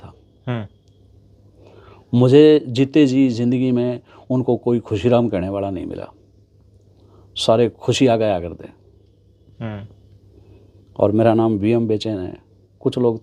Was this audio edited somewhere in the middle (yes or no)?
no